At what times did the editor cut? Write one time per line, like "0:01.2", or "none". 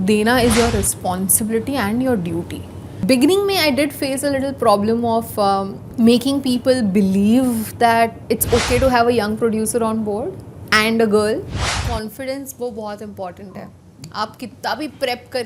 0:03.0
0:05.8
0:08.2
0:11.8